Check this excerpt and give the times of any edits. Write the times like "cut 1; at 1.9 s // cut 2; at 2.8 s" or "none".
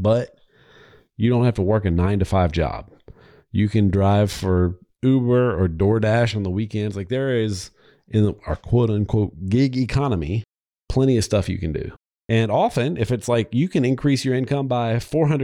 cut 1; at 11.9 s